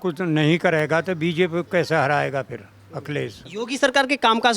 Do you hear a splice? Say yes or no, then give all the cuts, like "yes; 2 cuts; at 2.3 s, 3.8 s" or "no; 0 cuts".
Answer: yes; 1 cut; at 3.4 s